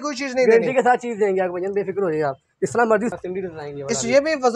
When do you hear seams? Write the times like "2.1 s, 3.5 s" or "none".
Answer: 3.1 s